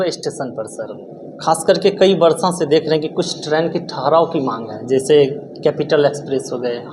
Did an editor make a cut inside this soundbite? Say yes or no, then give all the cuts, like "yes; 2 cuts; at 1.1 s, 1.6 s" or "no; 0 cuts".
no; 0 cuts